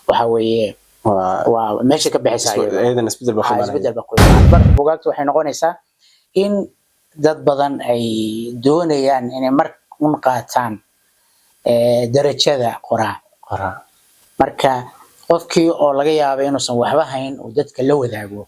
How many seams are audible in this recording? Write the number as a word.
one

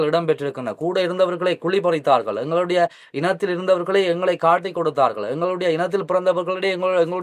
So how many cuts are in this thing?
zero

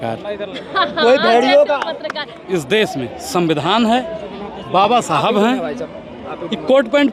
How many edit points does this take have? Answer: one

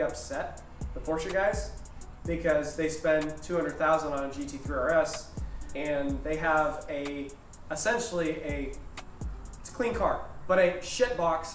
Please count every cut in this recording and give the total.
zero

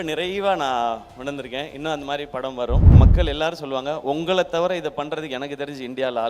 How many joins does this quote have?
one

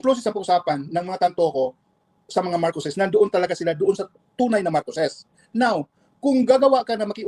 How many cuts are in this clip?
zero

